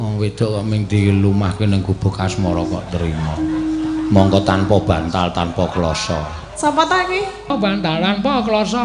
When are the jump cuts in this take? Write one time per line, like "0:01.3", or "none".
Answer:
0:07.5